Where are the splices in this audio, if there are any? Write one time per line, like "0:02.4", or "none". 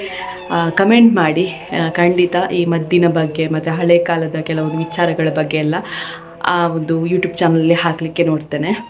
none